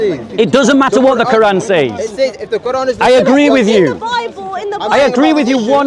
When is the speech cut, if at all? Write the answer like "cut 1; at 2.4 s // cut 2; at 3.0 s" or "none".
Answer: none